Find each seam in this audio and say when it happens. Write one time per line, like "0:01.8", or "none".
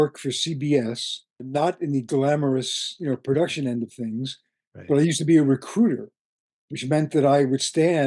0:01.5